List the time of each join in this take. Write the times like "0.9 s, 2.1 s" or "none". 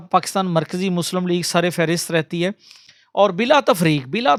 none

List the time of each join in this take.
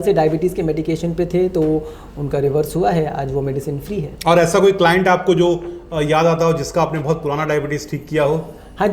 4.1 s

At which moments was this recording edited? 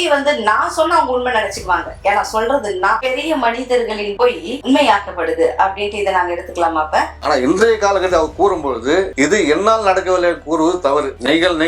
3.0 s, 7.2 s

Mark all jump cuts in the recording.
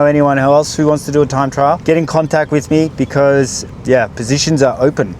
1.8 s, 3.6 s

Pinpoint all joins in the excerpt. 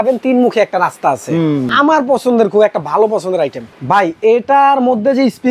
1.7 s, 3.7 s

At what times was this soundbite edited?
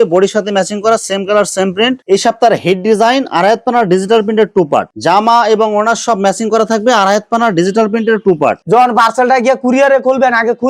2.0 s, 4.9 s, 8.6 s

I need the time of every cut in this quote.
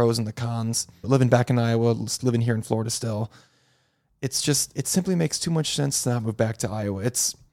1.1 s

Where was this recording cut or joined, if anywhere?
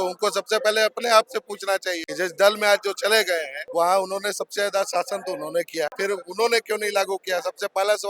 2.0 s, 3.6 s, 5.9 s

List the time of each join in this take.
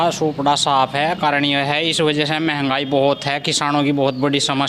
none

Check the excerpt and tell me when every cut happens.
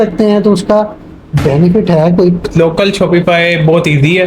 2.5 s

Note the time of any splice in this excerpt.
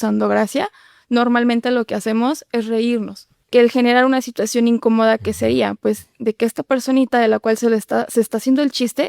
3.3 s

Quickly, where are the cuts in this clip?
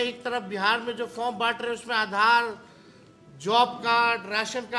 none

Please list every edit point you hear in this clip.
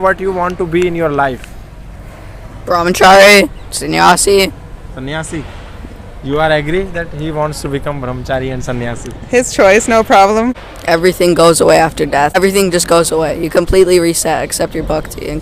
10.6 s, 12.4 s

